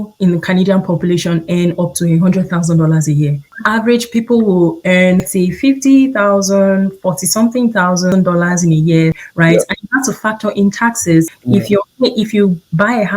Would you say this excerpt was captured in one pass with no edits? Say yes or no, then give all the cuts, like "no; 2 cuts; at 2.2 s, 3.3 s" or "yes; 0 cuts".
no; 5 cuts; at 3.5 s, 5.3 s, 8.1 s, 9.2 s, 11.4 s